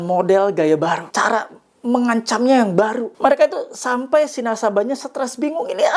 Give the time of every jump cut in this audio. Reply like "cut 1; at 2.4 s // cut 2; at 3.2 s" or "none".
cut 1; at 1.1 s // cut 2; at 3.1 s